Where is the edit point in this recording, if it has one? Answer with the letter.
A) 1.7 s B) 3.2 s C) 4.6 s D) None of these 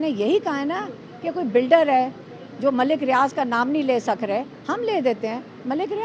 D